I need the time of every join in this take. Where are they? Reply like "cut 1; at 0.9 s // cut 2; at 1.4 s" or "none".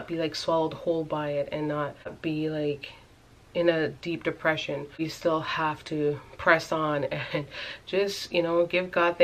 cut 1; at 2.0 s // cut 2; at 5.0 s